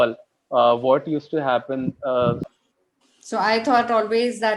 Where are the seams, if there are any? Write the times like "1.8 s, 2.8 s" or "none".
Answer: 2.5 s